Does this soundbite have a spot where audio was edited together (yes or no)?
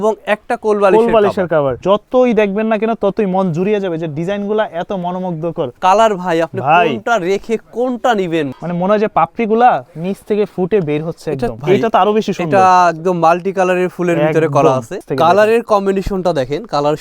yes